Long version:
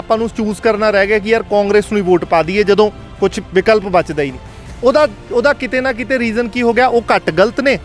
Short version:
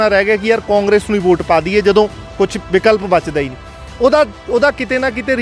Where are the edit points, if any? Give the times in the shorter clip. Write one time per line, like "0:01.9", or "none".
none